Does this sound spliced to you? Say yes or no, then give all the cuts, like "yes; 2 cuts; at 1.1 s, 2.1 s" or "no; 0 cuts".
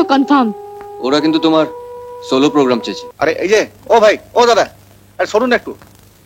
yes; 1 cut; at 3.0 s